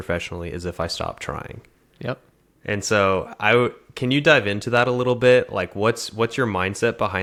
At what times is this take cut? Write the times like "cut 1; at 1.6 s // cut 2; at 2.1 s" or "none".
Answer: none